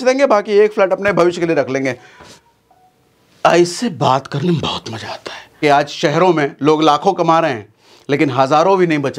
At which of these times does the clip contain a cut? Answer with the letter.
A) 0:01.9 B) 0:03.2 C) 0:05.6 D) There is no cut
C